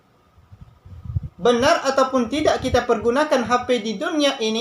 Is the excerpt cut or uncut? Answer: uncut